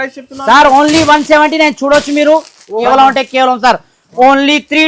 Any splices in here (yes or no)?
yes